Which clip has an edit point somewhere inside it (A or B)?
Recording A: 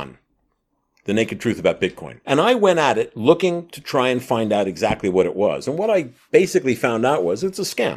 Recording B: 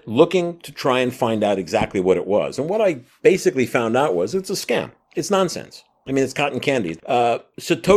B